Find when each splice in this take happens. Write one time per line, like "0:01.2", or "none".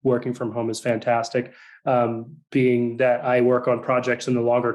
none